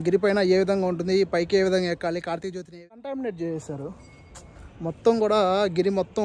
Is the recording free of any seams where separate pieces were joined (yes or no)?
no